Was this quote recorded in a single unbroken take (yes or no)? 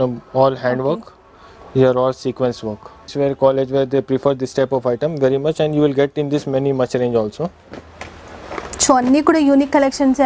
no